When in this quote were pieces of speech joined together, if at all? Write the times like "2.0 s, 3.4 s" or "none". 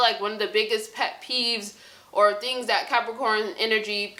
none